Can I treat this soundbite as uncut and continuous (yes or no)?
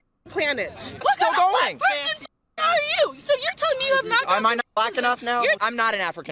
no